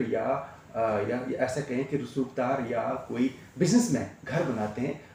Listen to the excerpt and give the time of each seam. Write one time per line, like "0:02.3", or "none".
none